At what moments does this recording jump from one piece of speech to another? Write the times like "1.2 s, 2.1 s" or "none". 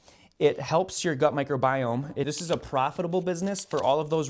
2.2 s